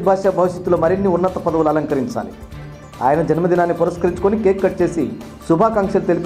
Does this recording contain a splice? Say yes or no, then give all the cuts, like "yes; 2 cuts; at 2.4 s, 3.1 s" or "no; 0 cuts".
no; 0 cuts